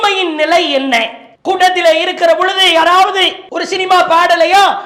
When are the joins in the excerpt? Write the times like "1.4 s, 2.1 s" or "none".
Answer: none